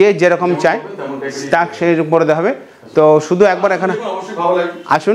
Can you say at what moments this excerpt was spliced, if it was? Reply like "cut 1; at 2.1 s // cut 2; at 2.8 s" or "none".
none